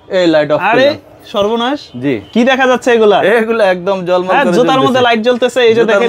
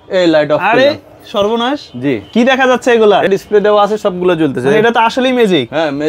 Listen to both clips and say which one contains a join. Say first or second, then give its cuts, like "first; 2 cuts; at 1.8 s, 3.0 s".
second; 1 cut; at 3.3 s